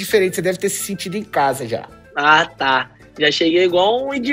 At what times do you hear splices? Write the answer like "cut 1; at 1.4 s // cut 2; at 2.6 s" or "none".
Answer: none